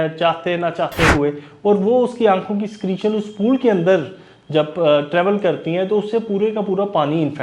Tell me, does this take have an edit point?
no; 0 cuts

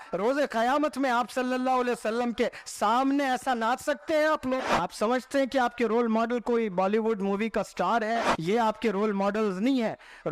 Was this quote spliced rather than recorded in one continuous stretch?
yes; 2 cuts; at 4.7 s, 8.3 s

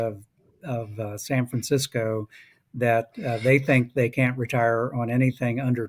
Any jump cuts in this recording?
no; 0 cuts

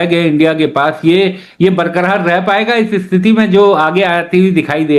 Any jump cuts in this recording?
no; 0 cuts

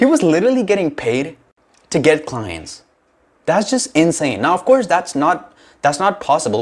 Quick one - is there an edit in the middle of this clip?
no; 0 cuts

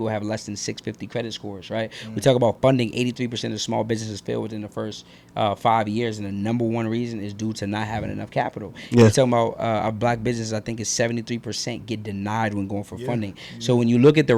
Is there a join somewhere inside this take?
no; 0 cuts

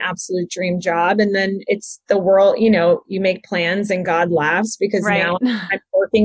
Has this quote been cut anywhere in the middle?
no; 0 cuts

